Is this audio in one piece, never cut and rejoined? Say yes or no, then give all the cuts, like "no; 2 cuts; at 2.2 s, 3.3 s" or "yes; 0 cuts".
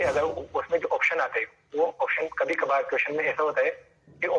yes; 0 cuts